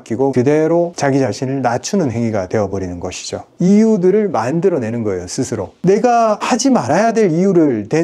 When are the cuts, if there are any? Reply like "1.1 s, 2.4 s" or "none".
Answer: 3.5 s